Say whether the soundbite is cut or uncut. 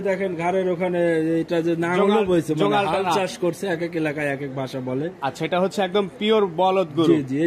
uncut